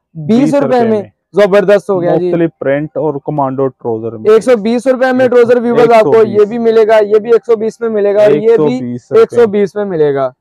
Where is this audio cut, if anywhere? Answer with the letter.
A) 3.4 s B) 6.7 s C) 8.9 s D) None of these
D